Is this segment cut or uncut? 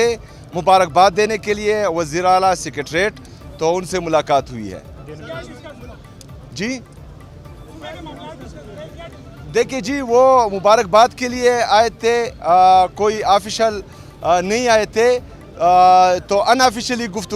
uncut